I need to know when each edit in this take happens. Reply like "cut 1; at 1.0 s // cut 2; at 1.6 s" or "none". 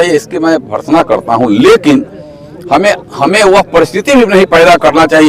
none